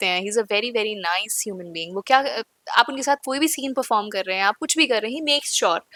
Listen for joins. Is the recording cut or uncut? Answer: uncut